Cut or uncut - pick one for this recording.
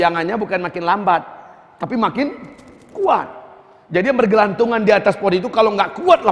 uncut